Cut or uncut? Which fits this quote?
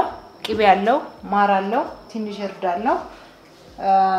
uncut